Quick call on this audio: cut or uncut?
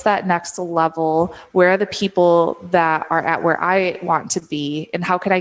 uncut